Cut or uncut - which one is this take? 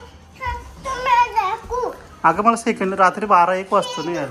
uncut